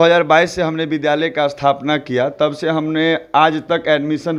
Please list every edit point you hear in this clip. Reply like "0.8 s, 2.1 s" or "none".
none